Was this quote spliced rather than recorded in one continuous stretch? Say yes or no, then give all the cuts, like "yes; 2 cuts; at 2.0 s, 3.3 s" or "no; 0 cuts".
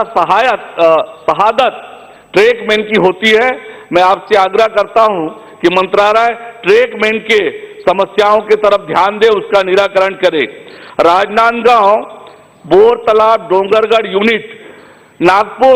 no; 0 cuts